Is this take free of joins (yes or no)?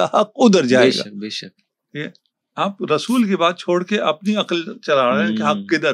yes